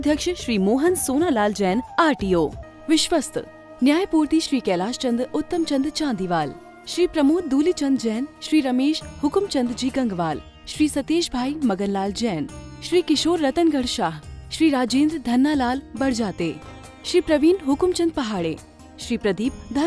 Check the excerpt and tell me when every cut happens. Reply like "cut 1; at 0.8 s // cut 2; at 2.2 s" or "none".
cut 1; at 2.6 s